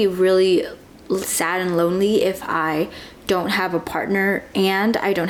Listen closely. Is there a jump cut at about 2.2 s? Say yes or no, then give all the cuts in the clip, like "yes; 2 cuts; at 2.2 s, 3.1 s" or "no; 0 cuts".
no; 0 cuts